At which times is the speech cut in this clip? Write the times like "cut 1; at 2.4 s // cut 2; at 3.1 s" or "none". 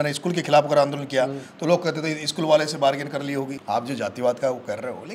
cut 1; at 3.6 s